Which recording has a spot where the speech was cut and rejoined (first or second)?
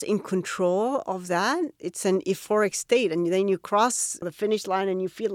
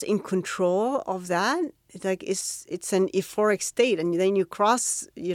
first